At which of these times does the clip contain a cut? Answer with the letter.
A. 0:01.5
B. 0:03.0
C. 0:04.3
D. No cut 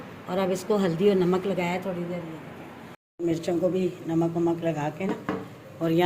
B